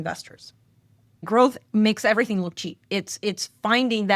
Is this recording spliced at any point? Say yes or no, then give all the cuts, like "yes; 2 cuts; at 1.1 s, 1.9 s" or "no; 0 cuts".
yes; 1 cut; at 1.2 s